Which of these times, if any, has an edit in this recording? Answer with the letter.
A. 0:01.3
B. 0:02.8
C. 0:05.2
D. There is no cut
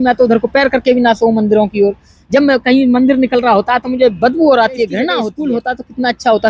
C